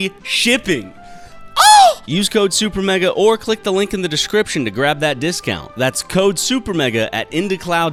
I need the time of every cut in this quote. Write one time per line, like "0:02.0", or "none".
none